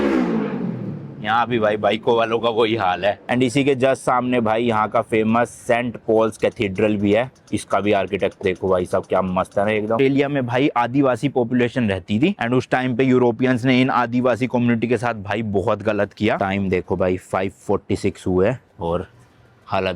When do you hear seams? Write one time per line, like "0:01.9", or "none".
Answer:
0:03.3
0:10.0
0:16.4